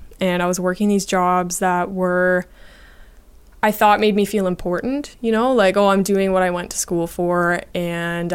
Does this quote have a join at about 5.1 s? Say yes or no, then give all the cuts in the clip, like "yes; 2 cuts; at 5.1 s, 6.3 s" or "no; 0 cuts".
no; 0 cuts